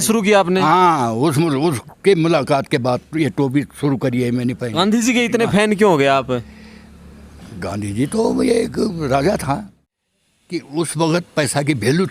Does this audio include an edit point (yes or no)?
yes